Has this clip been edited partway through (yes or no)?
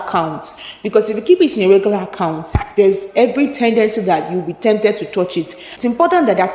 yes